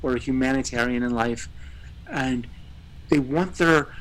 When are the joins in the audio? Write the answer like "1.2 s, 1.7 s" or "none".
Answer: none